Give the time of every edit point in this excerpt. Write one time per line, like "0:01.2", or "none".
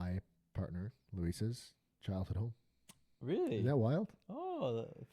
none